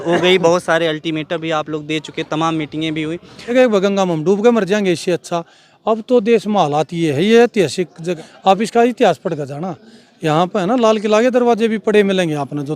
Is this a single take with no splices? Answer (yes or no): no